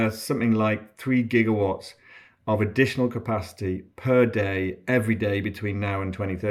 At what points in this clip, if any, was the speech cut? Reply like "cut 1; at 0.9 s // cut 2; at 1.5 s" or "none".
none